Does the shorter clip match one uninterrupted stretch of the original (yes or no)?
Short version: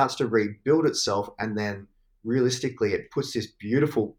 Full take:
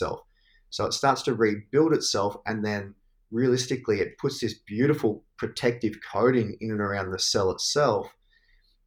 yes